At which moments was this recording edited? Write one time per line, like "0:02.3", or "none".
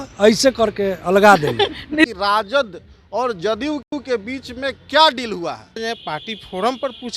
0:02.1
0:05.8

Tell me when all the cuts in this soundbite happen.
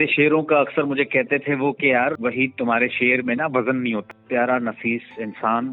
0:02.2
0:04.0

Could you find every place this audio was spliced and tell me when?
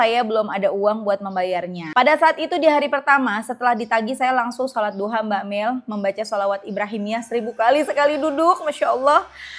0:01.8

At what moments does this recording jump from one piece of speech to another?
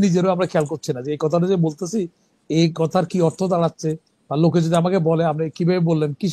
none

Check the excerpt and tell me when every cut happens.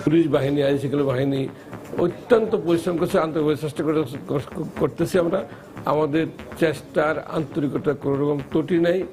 none

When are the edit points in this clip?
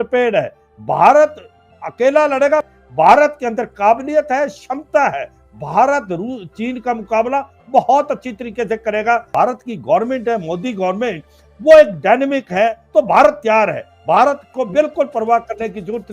0:02.6
0:09.3
0:12.8

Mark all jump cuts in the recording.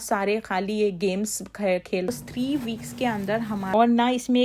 0:02.1
0:03.7

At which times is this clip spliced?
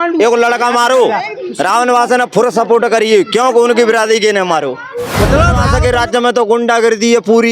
0:05.7

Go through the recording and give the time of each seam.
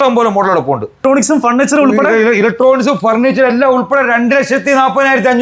0:01.0

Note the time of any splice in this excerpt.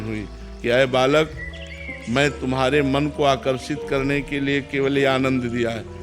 none

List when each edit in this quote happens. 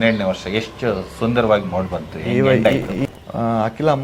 0:03.0

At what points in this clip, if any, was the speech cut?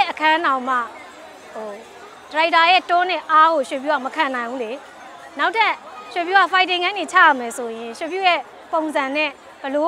none

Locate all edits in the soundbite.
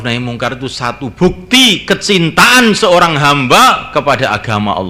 none

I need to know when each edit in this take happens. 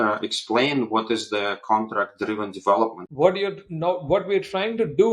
0:03.0

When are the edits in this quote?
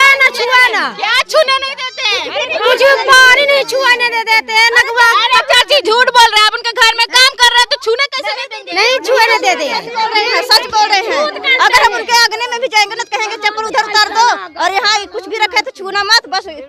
none

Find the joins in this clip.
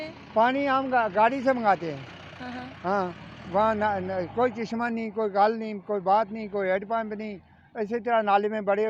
none

